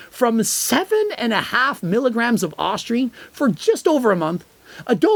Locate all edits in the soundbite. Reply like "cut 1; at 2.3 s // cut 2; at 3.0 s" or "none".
none